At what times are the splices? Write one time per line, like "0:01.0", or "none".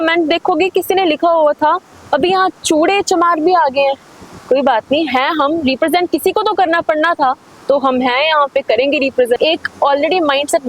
0:09.4